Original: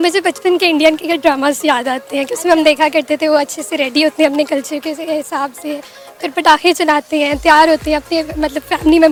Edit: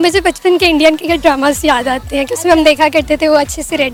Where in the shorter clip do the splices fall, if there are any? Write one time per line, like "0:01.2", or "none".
none